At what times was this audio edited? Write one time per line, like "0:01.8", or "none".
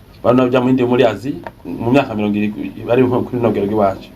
0:01.7